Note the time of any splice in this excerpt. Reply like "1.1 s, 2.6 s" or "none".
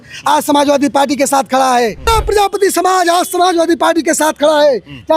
2.1 s

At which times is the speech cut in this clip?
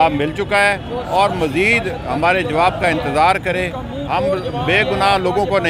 none

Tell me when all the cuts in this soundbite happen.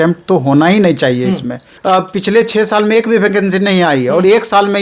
1.7 s

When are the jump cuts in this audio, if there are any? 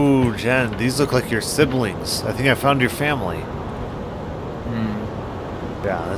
none

